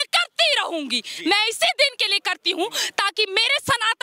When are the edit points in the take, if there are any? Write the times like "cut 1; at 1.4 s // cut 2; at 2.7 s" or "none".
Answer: none